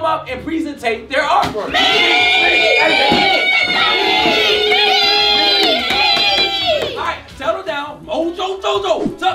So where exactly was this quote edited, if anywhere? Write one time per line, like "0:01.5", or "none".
none